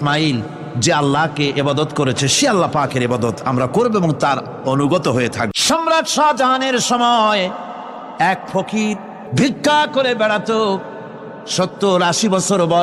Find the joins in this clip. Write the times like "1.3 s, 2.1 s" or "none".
5.5 s, 9.2 s